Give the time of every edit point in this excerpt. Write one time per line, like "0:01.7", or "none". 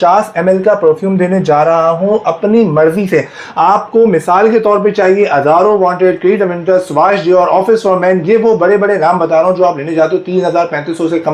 none